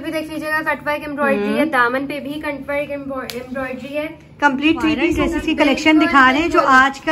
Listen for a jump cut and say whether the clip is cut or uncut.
cut